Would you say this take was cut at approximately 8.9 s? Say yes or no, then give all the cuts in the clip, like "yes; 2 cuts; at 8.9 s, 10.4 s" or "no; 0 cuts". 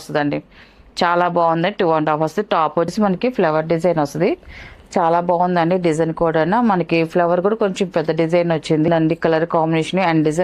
yes; 2 cuts; at 2.9 s, 8.9 s